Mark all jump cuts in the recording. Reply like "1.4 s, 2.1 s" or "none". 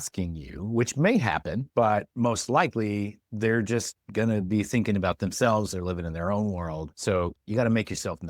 6.9 s